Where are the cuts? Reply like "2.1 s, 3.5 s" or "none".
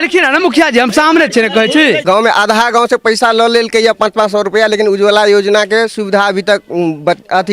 2.0 s